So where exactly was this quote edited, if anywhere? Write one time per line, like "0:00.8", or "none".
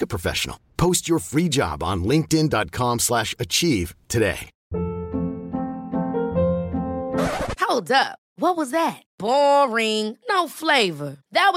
0:04.5